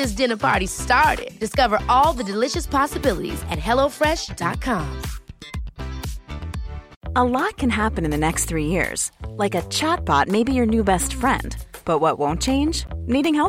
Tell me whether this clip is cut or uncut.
cut